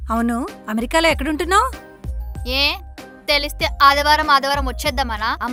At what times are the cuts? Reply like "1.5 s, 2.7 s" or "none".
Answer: none